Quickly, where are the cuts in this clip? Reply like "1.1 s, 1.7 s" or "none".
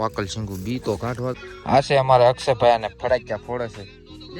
1.4 s